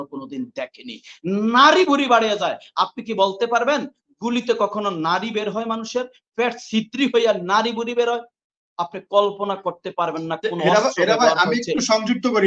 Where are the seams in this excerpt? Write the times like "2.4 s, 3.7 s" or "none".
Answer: none